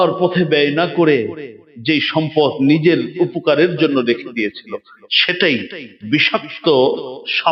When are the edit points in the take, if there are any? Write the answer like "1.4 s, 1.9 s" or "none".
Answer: none